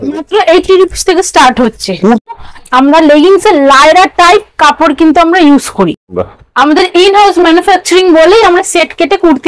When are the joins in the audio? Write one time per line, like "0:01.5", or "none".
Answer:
0:02.3
0:06.1